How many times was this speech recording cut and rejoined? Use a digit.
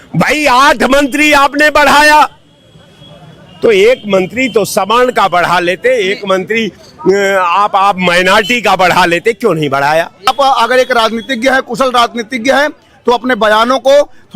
1